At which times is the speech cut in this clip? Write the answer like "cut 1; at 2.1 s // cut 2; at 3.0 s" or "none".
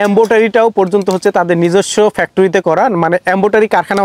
none

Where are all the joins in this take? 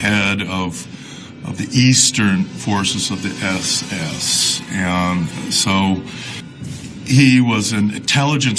cut 1; at 3.3 s

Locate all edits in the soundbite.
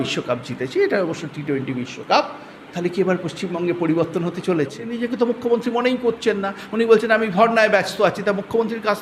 cut 1; at 4.9 s

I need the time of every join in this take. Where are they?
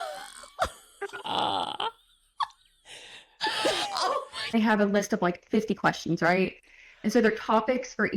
cut 1; at 4.5 s

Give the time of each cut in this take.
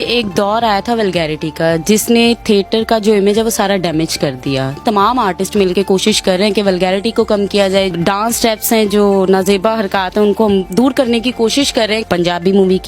cut 1; at 4.8 s // cut 2; at 7.9 s // cut 3; at 12.0 s

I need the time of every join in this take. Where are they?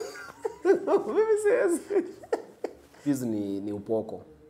cut 1; at 3.0 s

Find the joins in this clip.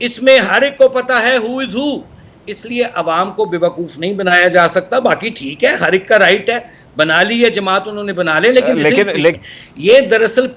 cut 1; at 9.3 s

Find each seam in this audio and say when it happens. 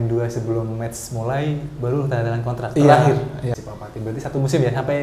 cut 1; at 3.6 s

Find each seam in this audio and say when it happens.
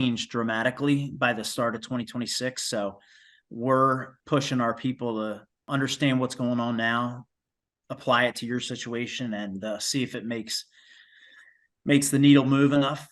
cut 1; at 4.1 s // cut 2; at 5.6 s

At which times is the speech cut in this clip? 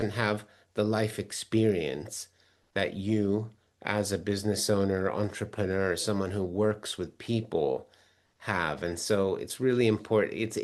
none

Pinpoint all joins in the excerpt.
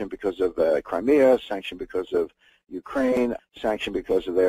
cut 1; at 1.1 s

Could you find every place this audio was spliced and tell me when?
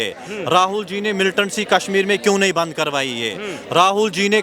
none

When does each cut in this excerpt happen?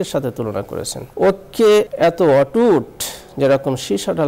cut 1; at 1.0 s // cut 2; at 1.9 s

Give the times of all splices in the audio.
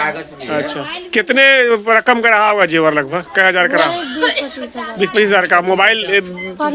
none

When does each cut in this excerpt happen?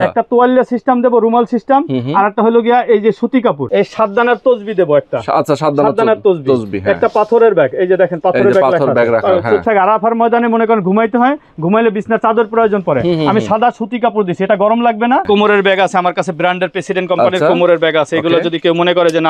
cut 1; at 3.6 s // cut 2; at 9.6 s // cut 3; at 15.3 s

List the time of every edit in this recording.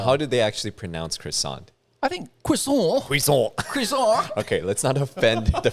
none

